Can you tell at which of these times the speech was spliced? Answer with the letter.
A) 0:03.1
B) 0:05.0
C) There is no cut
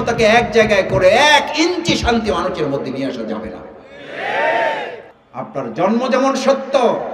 B